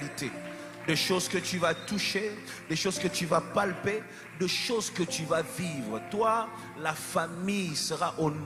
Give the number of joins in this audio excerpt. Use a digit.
0